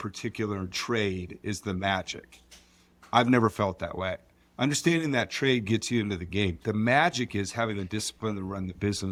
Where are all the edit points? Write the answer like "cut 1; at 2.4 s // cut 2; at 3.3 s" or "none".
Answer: none